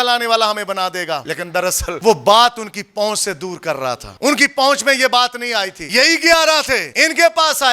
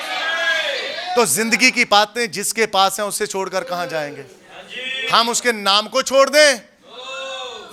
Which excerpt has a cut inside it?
first; 4 cuts; at 1.6 s, 4.1 s, 5.8 s, 6.9 s

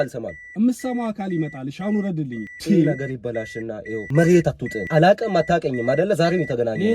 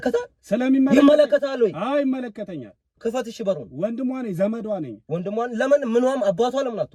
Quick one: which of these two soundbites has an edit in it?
first; 3 cuts; at 2.5 s, 4.0 s, 4.8 s

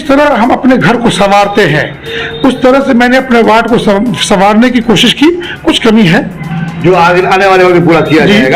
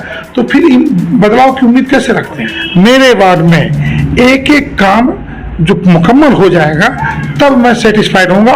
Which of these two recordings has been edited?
second; 1 cut; at 2.5 s

